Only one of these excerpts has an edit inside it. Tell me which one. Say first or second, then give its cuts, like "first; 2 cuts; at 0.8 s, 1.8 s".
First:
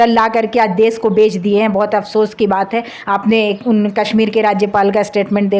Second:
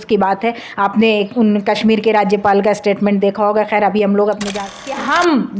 second; 1 cut; at 4.6 s